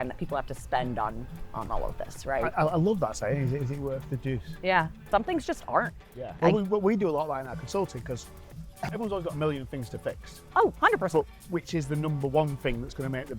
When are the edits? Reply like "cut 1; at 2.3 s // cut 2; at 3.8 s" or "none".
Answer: cut 1; at 5.1 s // cut 2; at 6.4 s // cut 3; at 8.9 s